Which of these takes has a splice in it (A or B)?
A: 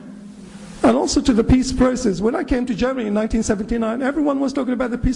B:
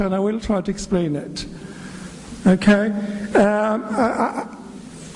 A